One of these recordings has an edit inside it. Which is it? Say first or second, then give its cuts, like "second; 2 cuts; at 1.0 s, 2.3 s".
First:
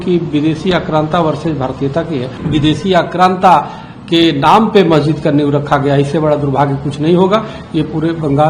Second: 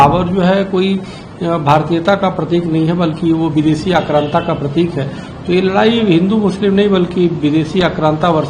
first; 1 cut; at 2.4 s